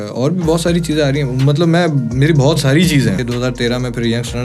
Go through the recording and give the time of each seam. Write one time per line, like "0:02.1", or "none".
0:03.2